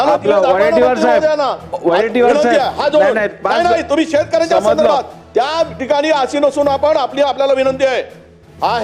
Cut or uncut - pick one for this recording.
uncut